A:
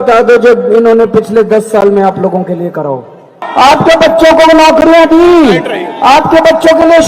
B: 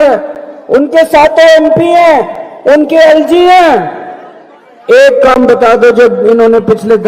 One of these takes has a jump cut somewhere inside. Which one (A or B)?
A